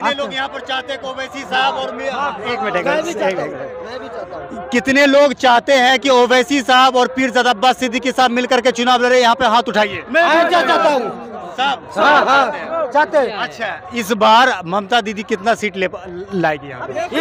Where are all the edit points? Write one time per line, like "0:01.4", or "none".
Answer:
none